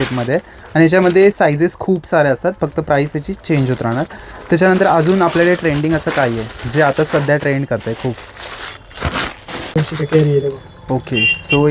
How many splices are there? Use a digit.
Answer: 0